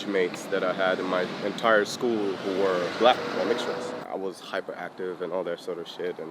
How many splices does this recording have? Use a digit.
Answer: 1